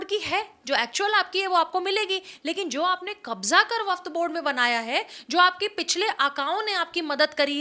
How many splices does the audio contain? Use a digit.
0